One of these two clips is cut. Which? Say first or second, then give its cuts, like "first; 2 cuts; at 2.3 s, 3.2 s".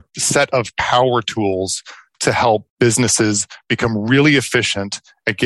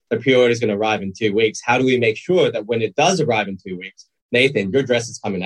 first; 1 cut; at 2.7 s